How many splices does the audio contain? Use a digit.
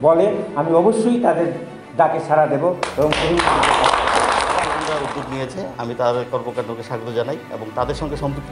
1